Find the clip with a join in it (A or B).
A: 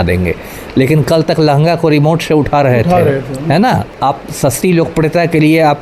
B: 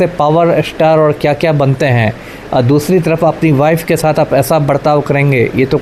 A